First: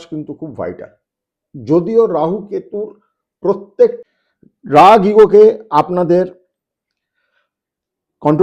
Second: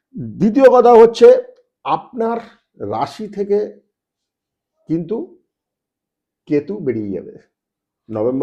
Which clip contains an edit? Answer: first; 1 cut; at 3.9 s

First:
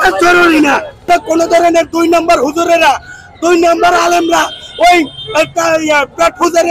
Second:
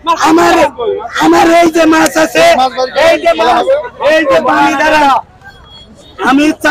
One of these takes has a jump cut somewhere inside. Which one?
first; 1 cut; at 1.1 s

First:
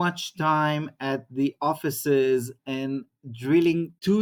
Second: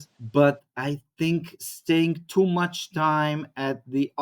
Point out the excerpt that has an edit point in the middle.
second; 1 cut; at 1.6 s

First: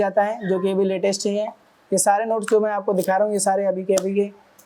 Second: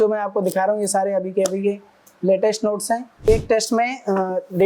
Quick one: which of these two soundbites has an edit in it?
second; 1 cut; at 3.3 s

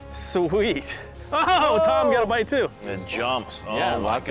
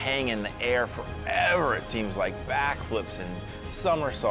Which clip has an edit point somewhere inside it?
first; 1 cut; at 2.7 s

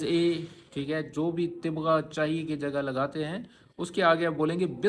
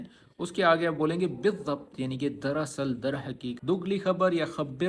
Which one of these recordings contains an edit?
second; 1 cut; at 3.6 s

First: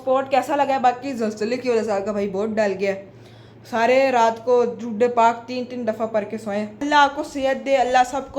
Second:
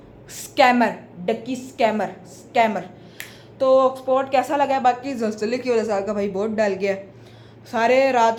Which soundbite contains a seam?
first; 1 cut; at 6.8 s

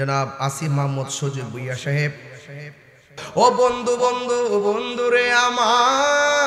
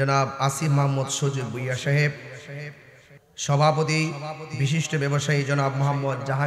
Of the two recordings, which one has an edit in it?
first; 1 cut; at 3.2 s

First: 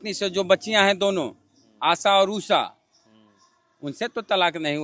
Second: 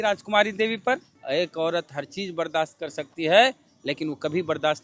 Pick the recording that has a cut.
second; 1 cut; at 1.1 s

